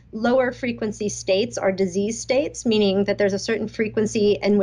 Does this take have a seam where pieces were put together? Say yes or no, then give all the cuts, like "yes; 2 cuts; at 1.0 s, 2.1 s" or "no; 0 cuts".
no; 0 cuts